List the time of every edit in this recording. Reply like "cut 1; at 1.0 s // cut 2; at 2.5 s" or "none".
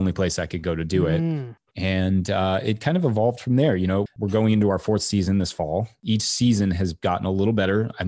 cut 1; at 1.7 s // cut 2; at 4.1 s // cut 3; at 6.0 s